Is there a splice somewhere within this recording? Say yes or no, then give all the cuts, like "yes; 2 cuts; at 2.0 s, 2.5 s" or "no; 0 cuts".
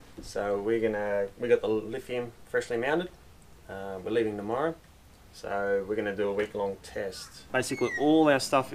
yes; 1 cut; at 7.4 s